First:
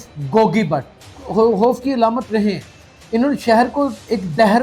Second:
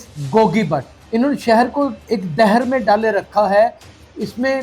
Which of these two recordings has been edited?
second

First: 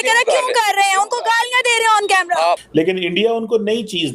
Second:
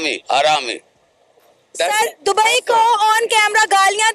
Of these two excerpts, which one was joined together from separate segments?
first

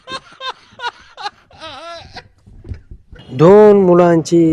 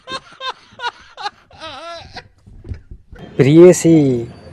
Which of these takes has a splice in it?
first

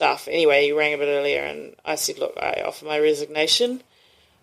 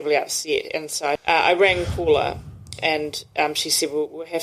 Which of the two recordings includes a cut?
second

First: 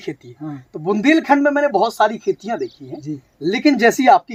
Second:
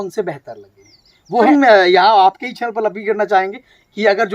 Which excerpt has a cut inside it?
second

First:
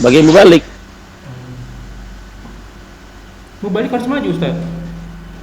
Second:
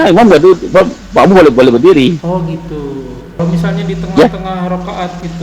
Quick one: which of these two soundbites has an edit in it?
second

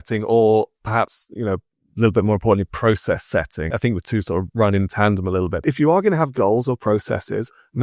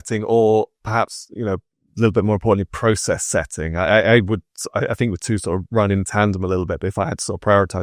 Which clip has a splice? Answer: first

